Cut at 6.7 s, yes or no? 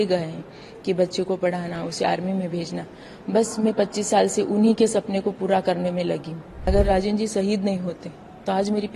yes